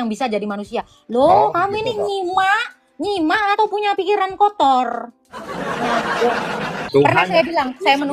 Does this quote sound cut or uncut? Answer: cut